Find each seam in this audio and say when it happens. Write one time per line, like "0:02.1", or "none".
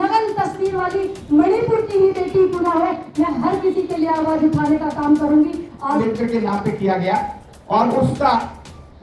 0:05.9